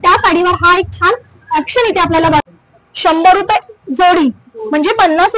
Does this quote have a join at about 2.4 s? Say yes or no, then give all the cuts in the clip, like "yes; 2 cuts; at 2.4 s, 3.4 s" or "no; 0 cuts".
yes; 1 cut; at 2.4 s